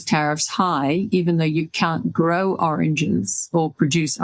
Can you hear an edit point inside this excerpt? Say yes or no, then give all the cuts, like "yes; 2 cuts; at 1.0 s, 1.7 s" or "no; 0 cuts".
no; 0 cuts